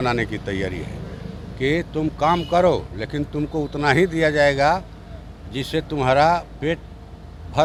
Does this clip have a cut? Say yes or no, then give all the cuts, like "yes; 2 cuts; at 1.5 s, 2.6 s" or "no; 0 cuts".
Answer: no; 0 cuts